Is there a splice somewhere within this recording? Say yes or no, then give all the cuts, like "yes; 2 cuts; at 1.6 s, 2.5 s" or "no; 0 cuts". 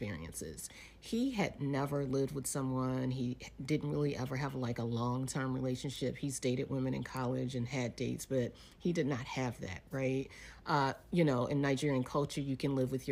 no; 0 cuts